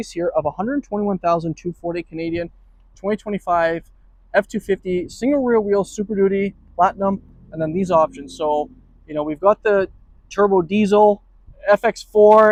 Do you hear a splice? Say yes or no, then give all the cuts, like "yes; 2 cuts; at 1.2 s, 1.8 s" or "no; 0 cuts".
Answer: no; 0 cuts